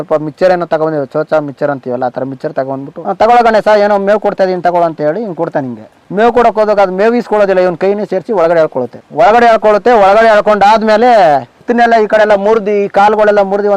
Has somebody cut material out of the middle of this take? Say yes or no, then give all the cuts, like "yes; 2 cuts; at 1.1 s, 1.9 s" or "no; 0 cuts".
yes; 2 cuts; at 3.0 s, 11.7 s